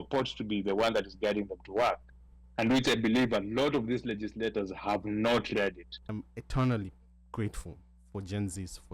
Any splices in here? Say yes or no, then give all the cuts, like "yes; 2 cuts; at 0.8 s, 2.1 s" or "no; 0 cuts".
yes; 1 cut; at 5.9 s